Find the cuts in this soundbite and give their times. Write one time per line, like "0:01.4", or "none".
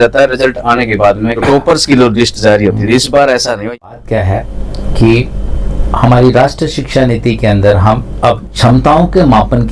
0:01.4
0:03.6
0:08.5